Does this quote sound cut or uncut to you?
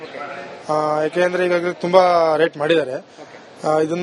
cut